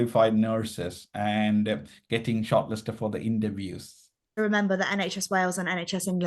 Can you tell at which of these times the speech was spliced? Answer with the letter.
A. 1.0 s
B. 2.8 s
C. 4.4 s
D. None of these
C